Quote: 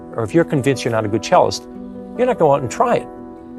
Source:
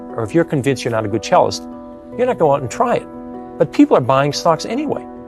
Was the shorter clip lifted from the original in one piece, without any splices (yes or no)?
yes